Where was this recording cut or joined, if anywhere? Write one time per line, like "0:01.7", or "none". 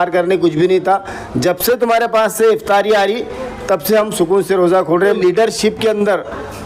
0:05.2